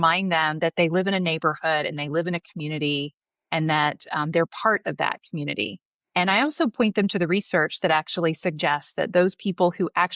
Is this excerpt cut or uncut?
uncut